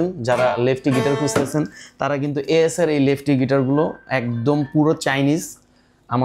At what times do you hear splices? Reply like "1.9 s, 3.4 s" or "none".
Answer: none

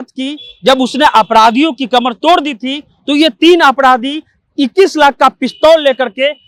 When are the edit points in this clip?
none

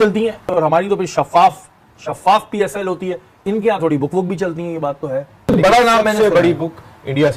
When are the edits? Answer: 5.5 s

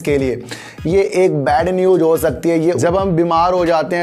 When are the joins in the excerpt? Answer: 2.8 s

